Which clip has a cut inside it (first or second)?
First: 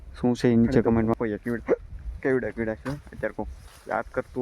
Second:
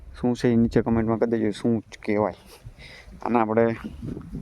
first